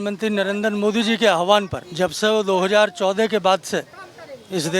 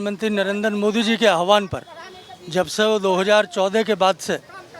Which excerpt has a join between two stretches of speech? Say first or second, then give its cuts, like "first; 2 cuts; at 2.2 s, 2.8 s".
first; 1 cut; at 1.8 s